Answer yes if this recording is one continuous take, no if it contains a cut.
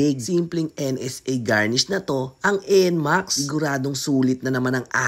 yes